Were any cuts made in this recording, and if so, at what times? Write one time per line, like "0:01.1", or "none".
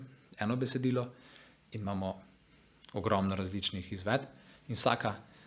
none